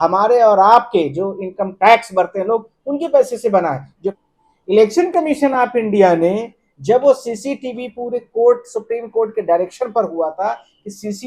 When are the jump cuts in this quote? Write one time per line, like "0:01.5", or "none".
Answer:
0:04.0